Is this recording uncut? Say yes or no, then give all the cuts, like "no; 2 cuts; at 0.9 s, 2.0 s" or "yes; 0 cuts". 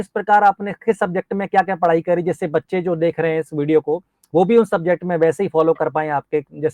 yes; 0 cuts